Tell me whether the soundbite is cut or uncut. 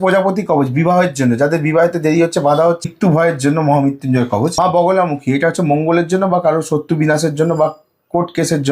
cut